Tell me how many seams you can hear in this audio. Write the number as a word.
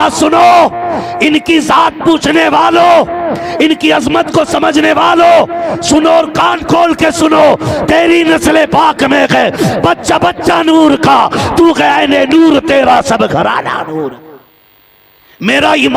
one